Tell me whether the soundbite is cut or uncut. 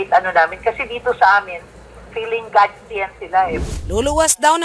cut